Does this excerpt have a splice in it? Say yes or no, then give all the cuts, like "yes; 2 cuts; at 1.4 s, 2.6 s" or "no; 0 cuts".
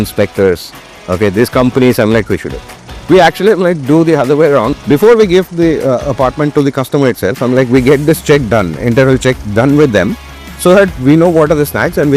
yes; 1 cut; at 4.7 s